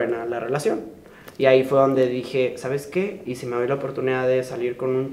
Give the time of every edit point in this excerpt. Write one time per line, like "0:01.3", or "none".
none